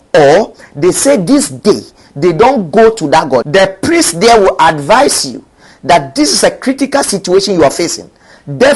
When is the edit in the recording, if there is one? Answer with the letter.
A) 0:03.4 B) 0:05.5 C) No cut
A